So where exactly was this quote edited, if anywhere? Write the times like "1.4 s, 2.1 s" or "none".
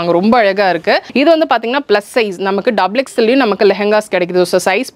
1.1 s